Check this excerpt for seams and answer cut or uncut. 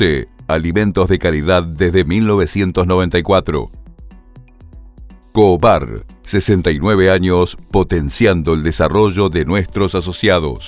cut